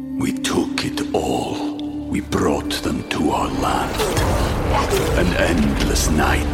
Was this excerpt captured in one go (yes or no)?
yes